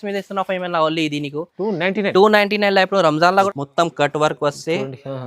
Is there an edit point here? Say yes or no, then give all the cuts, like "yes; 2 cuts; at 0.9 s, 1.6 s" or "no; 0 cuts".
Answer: yes; 1 cut; at 3.5 s